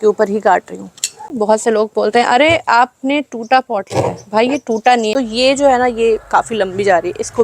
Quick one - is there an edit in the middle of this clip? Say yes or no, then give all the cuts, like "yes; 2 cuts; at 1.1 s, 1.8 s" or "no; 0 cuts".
yes; 2 cuts; at 1.3 s, 5.1 s